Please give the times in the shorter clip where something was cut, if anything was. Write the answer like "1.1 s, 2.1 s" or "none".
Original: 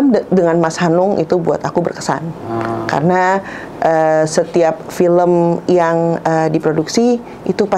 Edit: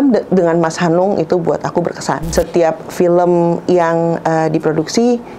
2.3 s